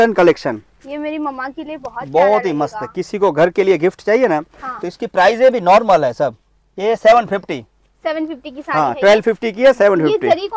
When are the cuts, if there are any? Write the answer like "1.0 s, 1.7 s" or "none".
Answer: none